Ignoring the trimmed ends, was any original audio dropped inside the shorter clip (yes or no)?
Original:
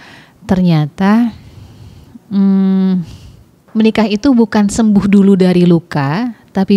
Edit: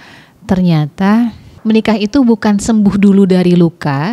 yes